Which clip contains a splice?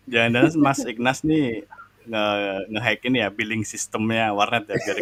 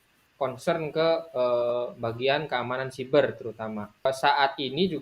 second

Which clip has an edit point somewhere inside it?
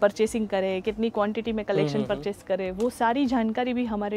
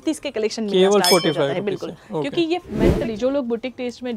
second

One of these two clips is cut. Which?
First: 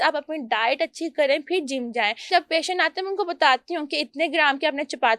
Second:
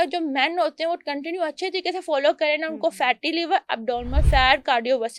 first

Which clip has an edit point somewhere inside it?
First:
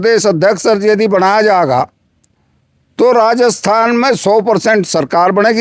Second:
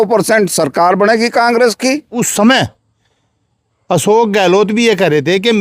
second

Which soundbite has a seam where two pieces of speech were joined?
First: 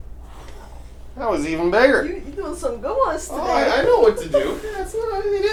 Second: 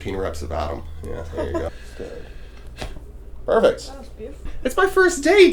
second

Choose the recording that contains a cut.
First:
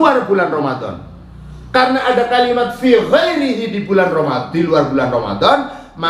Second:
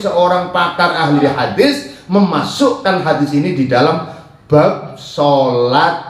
second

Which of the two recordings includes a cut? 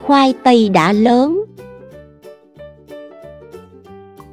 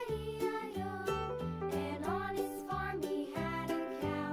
first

